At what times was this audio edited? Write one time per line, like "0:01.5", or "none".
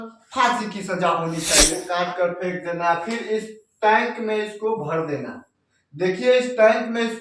0:01.8